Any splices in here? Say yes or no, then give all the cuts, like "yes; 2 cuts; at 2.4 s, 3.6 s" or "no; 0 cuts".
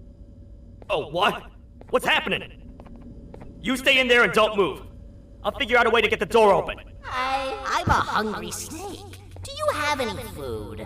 yes; 1 cut; at 7.1 s